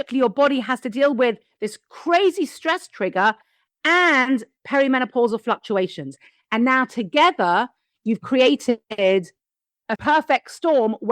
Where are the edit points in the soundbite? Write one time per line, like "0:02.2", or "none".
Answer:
0:09.9